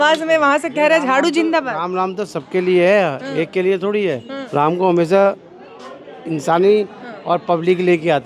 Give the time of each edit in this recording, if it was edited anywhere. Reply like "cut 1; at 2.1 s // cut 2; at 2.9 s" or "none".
cut 1; at 4.3 s